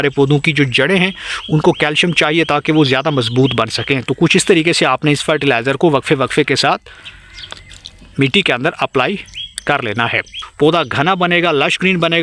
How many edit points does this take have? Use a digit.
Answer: 1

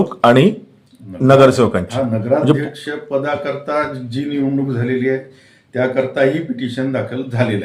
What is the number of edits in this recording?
0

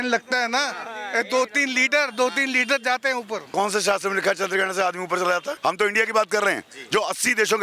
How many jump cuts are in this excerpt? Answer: 2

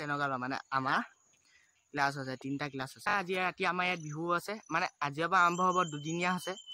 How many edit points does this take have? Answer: 1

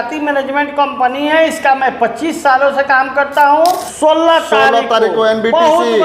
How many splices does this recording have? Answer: 1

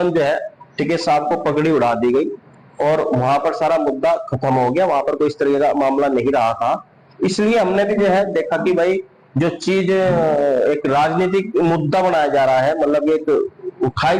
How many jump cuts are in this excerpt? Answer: 0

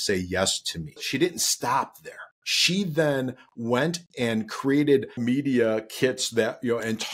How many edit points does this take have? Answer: 2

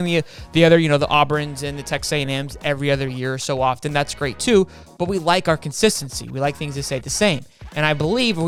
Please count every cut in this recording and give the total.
0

